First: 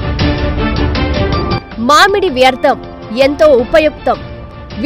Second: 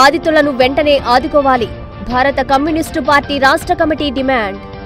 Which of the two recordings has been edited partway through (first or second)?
first